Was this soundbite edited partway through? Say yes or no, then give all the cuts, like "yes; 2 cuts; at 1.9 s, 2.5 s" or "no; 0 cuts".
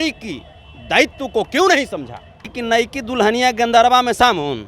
yes; 1 cut; at 2.6 s